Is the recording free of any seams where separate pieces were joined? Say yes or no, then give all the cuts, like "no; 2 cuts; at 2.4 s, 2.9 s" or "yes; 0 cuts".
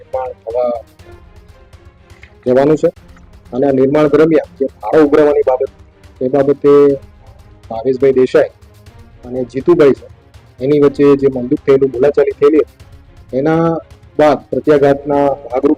yes; 0 cuts